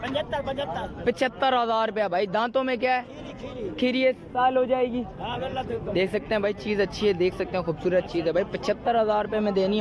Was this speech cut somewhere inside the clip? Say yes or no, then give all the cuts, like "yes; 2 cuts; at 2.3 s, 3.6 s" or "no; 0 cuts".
no; 0 cuts